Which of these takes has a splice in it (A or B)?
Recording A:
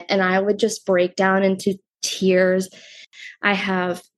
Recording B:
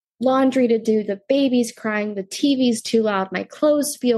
A